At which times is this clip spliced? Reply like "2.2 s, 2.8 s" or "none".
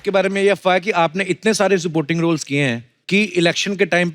2.9 s